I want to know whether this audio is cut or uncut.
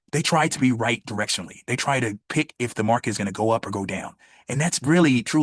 uncut